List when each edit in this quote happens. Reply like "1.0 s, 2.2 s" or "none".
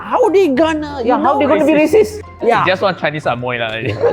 2.1 s